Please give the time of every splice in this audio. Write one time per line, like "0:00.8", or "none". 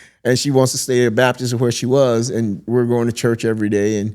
0:02.6